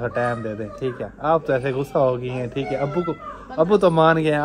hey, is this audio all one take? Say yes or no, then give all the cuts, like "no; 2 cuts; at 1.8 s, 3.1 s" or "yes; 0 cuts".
yes; 0 cuts